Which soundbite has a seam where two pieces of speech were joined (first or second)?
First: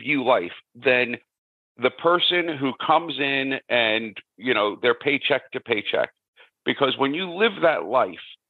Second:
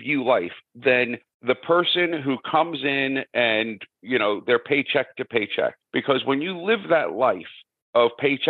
second